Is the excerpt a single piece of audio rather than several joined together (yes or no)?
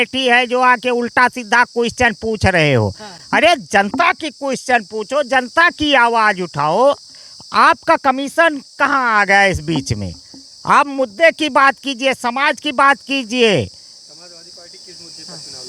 yes